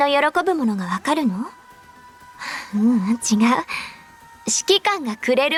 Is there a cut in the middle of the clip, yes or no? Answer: no